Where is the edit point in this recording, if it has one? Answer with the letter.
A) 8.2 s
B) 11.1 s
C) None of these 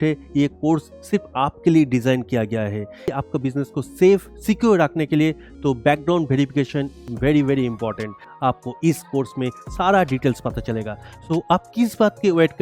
A